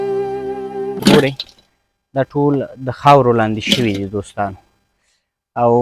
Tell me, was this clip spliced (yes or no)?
yes